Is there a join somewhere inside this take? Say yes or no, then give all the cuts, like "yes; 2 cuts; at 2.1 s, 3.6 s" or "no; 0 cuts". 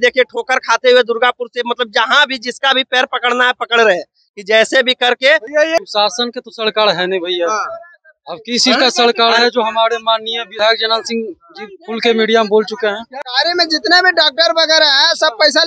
yes; 2 cuts; at 5.8 s, 13.1 s